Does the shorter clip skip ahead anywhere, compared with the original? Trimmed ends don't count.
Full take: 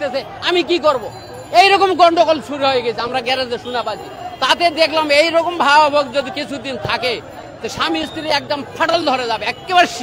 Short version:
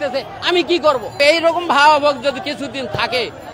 yes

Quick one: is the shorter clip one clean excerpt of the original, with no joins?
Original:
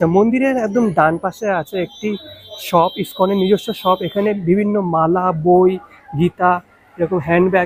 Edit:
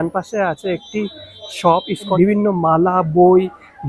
no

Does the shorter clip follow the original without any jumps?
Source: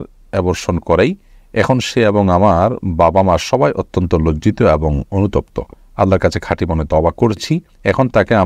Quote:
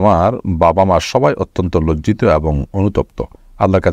yes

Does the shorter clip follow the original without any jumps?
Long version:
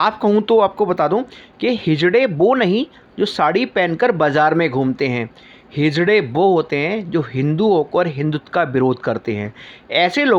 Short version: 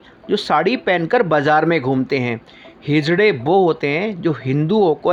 yes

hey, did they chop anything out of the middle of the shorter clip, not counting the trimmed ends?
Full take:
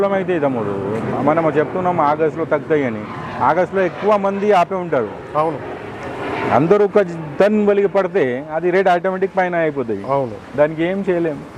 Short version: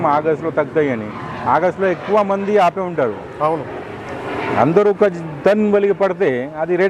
no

